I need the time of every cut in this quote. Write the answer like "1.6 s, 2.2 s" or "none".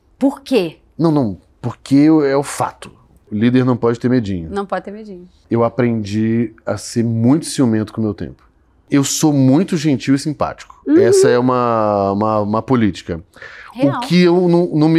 3.3 s, 5.4 s, 8.9 s